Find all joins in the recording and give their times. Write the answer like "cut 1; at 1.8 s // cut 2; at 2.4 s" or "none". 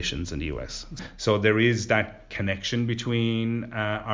cut 1; at 1.0 s // cut 2; at 2.3 s